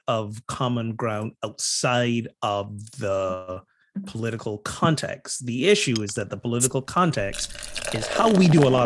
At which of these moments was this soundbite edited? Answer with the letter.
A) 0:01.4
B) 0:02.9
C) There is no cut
C